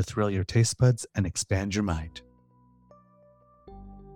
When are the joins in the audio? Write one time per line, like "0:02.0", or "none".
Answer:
0:02.1